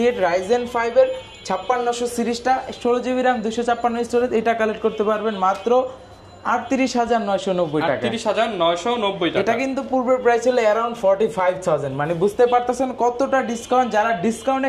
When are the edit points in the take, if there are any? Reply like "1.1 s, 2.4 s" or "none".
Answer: none